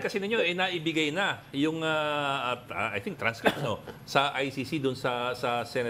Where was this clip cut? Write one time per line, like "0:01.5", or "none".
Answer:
none